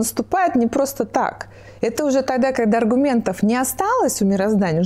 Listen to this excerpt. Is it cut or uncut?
uncut